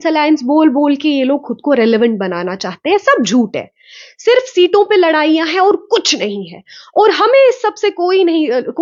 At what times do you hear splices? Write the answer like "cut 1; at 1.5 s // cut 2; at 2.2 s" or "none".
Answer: none